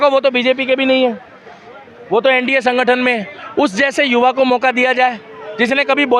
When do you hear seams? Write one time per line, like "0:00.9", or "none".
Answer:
none